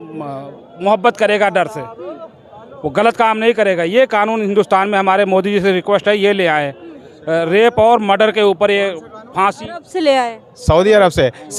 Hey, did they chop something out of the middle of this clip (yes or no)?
no